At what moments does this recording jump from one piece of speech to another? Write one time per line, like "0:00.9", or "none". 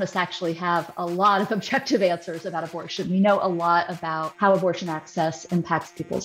0:04.2